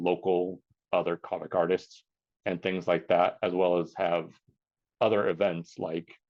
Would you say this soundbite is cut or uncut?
uncut